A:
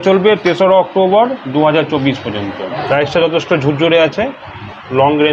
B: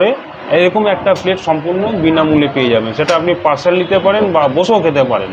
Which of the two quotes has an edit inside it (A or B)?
A